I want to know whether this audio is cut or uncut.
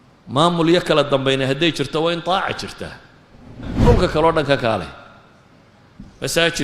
cut